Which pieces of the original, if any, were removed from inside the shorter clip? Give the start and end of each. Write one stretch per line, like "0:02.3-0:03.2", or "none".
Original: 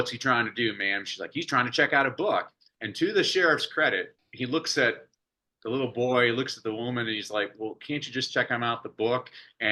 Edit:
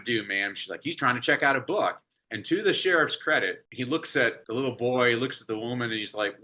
0:04.1-0:04.3
0:05.0-0:05.6